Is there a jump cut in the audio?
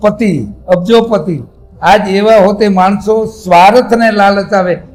no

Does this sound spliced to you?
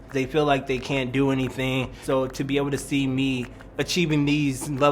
yes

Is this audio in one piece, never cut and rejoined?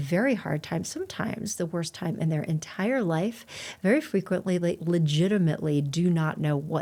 yes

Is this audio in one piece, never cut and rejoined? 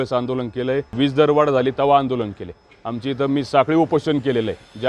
no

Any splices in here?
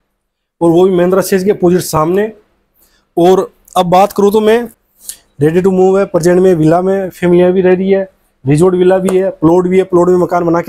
yes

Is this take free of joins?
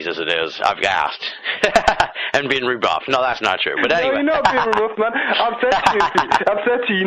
yes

